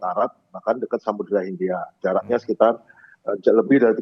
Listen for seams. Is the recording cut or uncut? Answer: uncut